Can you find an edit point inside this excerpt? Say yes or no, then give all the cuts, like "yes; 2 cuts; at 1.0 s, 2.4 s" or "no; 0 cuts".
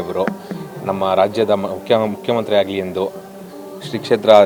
no; 0 cuts